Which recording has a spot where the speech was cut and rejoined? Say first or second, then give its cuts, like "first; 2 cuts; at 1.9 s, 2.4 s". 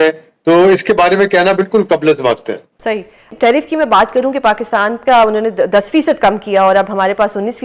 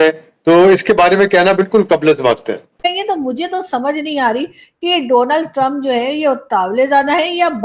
second; 1 cut; at 2.8 s